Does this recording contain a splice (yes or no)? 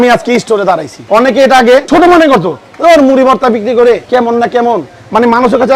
yes